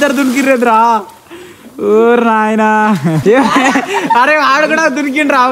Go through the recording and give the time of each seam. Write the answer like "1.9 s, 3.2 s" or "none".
3.2 s